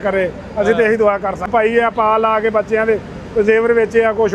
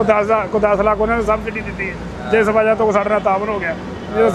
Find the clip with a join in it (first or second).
first